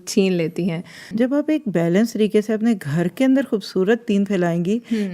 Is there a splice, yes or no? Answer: yes